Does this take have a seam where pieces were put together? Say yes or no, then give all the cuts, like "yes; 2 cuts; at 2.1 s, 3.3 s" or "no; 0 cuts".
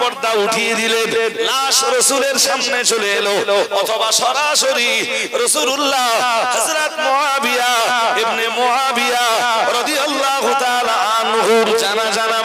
no; 0 cuts